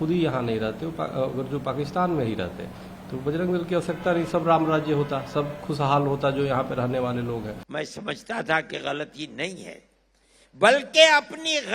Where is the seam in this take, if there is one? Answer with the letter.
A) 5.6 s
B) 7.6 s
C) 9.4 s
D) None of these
B